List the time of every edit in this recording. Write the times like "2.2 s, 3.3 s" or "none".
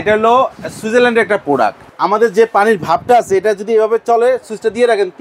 1.9 s

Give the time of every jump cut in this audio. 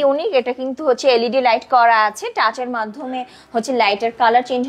none

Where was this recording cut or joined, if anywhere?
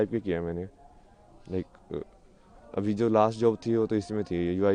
none

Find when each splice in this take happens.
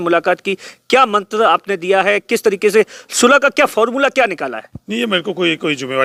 none

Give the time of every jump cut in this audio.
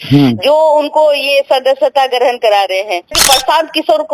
3.2 s

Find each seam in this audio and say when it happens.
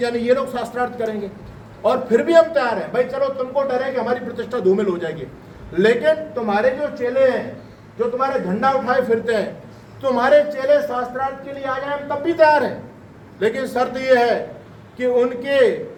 none

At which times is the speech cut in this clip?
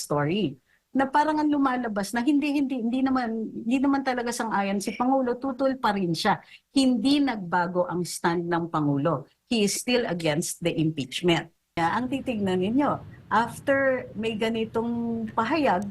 11.8 s

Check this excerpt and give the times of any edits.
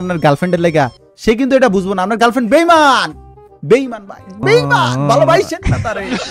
none

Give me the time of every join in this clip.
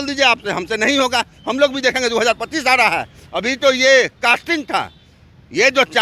none

